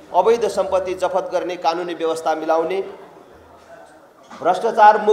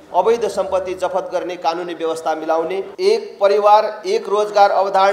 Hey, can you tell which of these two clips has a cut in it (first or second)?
second